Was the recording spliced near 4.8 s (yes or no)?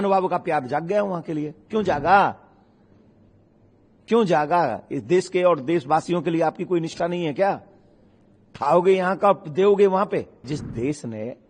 no